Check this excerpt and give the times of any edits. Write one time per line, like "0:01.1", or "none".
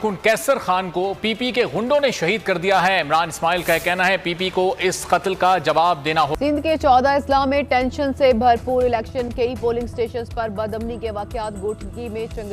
0:06.3